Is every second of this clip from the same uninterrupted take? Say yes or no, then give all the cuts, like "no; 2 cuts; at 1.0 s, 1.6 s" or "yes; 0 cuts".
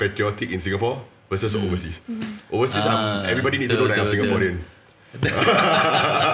yes; 0 cuts